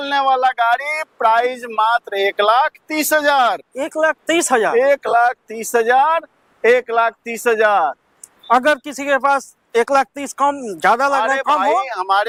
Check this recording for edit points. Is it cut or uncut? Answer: uncut